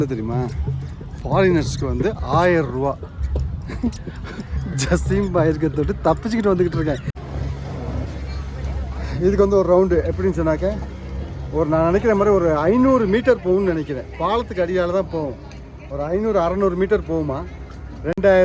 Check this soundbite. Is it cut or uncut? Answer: cut